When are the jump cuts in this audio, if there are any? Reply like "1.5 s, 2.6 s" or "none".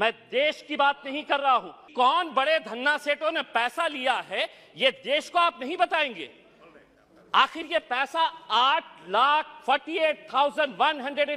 1.9 s